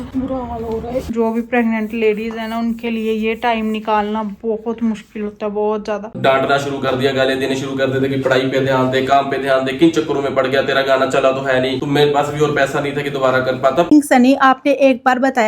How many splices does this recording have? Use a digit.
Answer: 3